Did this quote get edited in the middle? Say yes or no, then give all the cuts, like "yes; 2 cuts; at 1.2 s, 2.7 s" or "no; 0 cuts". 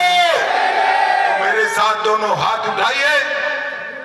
no; 0 cuts